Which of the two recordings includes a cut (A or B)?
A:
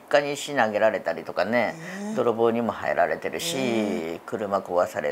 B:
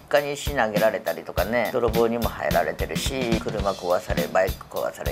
B